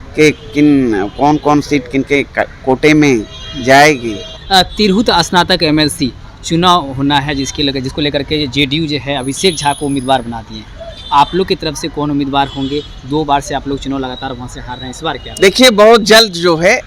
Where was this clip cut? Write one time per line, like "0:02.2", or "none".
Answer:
0:04.3